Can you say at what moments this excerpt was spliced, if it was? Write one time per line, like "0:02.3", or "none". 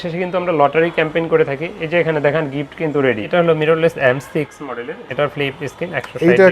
0:03.3